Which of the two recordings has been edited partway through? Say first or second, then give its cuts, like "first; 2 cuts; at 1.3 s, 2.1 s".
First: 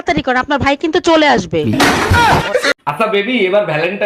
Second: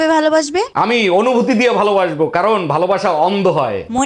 first; 1 cut; at 2.7 s